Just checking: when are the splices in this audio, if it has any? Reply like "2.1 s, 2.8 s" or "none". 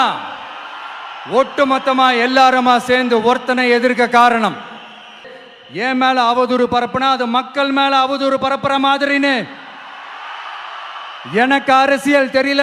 5.3 s